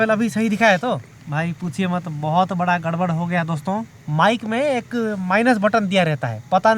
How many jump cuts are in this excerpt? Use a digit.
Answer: 2